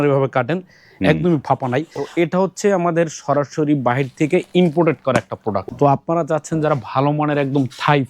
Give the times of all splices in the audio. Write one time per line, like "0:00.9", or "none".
0:02.0
0:05.6